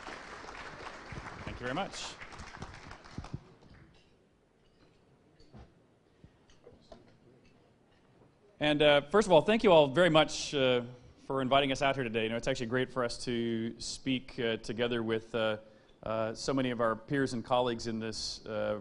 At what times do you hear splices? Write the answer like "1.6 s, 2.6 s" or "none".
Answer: 14.0 s